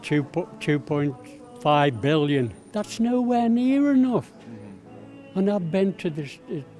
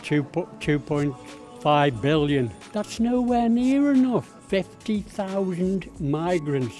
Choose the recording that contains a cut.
second; 1 cut; at 4.3 s

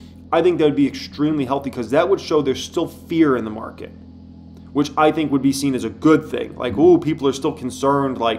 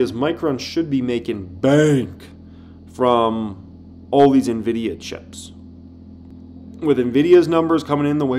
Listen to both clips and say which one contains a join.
second; 1 cut; at 6.3 s

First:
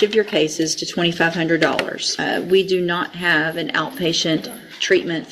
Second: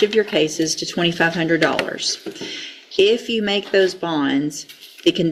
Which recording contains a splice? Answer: first; 1 cut; at 2.1 s

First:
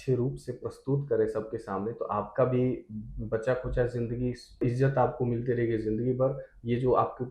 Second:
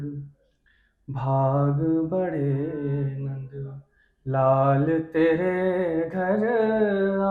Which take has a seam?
first; 1 cut; at 4.6 s

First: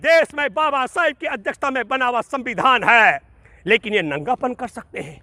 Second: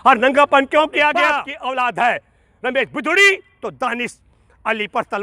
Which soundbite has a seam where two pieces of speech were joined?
second; 1 cut; at 1.5 s

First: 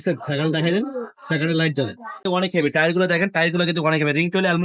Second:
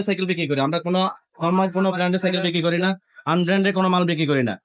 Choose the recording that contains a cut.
first; 1 cut; at 2.2 s

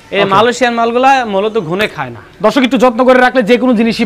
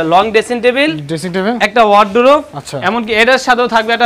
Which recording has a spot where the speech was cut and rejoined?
first; 1 cut; at 2.2 s

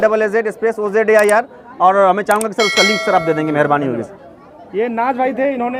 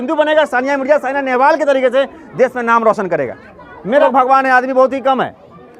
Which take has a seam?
second; 1 cut; at 4.0 s

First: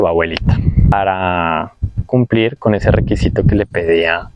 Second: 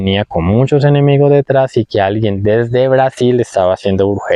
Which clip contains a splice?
first; 1 cut; at 0.9 s

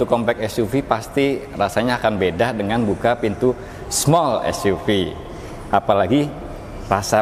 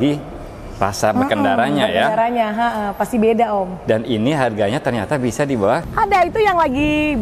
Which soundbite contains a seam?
second; 1 cut; at 5.9 s

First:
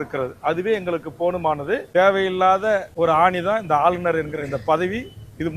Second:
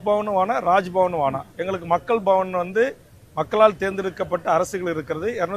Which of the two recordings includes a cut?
first; 2 cuts; at 1.9 s, 2.9 s

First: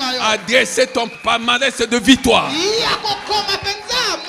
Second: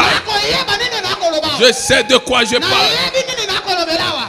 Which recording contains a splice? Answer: first; 1 cut; at 1.1 s

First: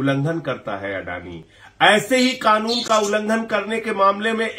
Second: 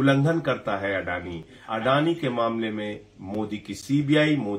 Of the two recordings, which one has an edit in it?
second; 1 cut; at 1.6 s

